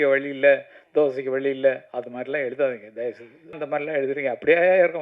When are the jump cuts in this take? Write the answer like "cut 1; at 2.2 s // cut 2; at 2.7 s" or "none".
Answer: cut 1; at 3.6 s

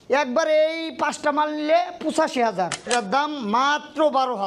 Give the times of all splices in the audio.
cut 1; at 2.9 s

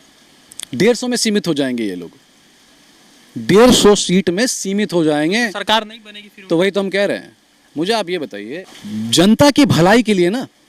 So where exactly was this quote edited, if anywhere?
cut 1; at 8.7 s

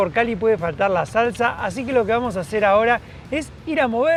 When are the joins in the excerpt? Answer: none

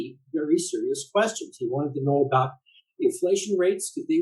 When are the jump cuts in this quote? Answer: none

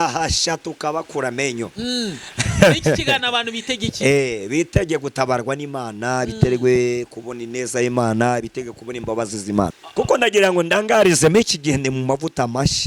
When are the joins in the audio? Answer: cut 1; at 9.8 s

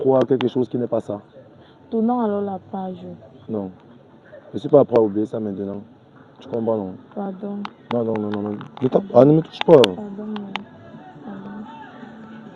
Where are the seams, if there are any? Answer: none

